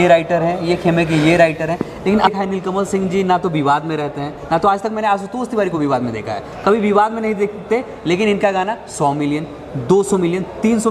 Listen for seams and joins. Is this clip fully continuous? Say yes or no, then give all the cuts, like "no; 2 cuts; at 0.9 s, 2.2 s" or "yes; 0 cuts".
no; 1 cut; at 2.3 s